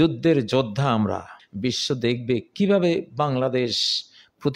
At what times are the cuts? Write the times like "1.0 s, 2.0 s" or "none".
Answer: 1.4 s